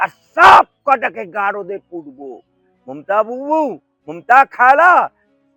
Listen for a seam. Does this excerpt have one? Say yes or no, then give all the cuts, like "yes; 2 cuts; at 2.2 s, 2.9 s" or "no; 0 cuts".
no; 0 cuts